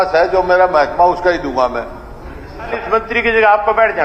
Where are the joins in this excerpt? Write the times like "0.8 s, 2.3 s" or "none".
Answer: 2.8 s